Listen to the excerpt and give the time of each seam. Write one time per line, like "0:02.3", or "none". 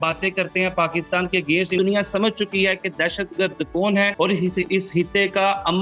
0:01.8
0:04.1